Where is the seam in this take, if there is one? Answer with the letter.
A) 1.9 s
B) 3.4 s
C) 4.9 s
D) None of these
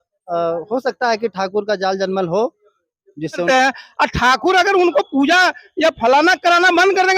B